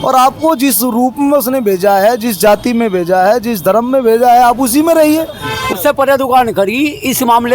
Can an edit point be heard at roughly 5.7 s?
yes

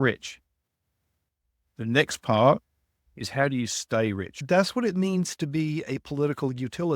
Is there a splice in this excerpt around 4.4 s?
yes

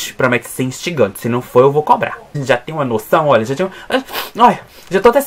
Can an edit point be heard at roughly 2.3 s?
yes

